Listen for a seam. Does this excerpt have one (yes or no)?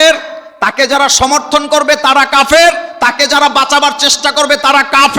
no